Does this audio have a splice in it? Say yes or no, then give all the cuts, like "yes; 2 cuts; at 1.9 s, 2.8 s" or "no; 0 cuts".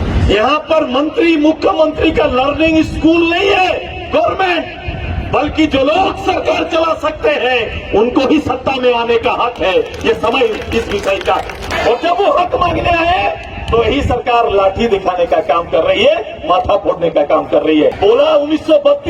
yes; 2 cuts; at 11.7 s, 17.9 s